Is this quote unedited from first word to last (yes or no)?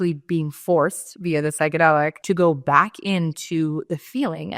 no